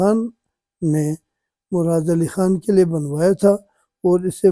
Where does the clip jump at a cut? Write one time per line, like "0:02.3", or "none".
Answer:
none